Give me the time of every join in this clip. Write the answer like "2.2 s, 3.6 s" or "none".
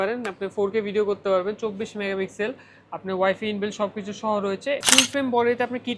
4.8 s